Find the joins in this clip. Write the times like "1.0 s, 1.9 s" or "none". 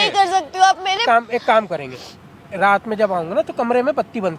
1.0 s